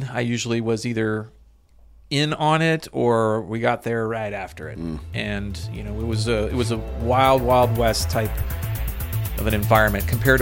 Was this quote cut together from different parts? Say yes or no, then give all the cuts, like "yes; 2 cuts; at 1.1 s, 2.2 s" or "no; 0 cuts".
no; 0 cuts